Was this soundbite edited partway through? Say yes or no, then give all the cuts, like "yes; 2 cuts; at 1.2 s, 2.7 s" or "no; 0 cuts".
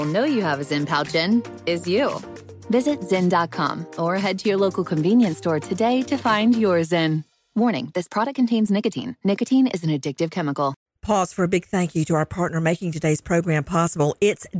yes; 1 cut; at 10.8 s